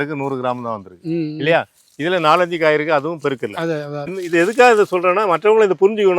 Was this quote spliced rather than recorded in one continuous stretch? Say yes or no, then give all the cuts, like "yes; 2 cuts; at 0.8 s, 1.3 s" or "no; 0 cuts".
yes; 1 cut; at 4.1 s